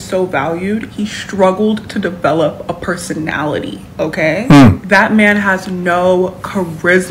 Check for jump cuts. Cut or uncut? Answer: uncut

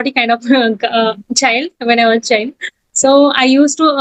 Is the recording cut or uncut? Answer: uncut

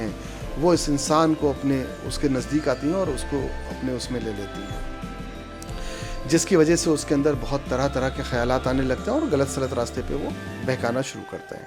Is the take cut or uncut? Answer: uncut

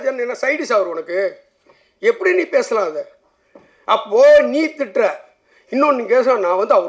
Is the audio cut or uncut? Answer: uncut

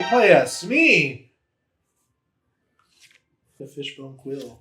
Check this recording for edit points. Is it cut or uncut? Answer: cut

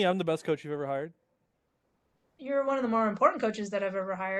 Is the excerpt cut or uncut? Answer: uncut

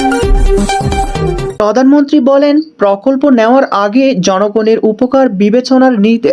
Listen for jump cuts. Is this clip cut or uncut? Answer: cut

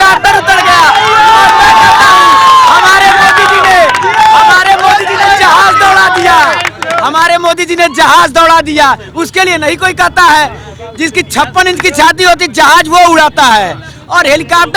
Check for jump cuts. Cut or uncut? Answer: uncut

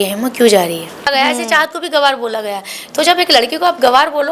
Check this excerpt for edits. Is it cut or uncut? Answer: cut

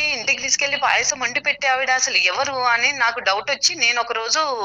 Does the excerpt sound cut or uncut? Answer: uncut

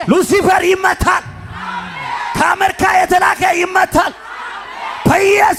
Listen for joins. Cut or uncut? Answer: uncut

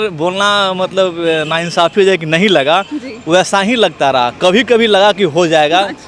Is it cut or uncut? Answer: uncut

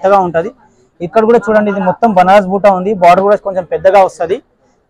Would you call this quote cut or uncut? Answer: uncut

